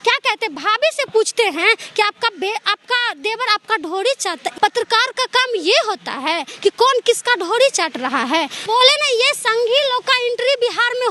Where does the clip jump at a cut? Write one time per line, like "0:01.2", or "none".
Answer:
0:04.5